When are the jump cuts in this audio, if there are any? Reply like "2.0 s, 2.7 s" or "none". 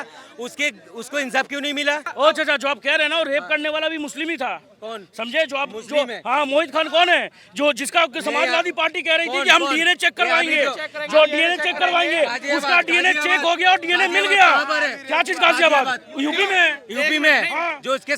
2.1 s